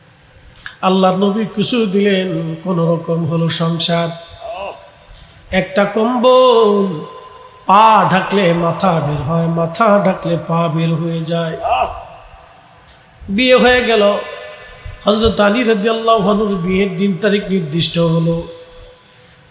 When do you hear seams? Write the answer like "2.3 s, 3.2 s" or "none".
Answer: none